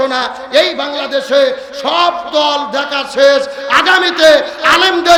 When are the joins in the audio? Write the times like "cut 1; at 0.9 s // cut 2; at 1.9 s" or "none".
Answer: none